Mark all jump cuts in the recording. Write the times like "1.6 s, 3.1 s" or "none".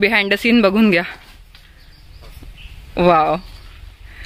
none